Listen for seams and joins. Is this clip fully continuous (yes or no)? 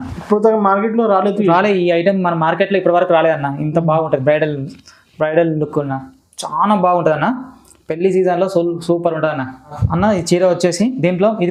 yes